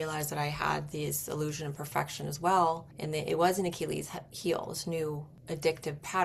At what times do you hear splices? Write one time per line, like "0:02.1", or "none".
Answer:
0:02.9
0:05.3